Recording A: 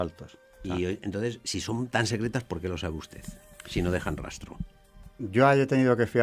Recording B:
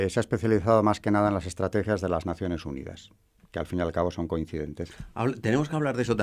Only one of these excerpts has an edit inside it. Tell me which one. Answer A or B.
B